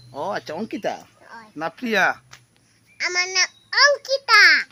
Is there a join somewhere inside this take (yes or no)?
no